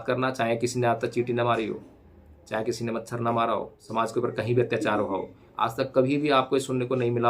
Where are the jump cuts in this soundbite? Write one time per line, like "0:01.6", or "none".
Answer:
0:03.8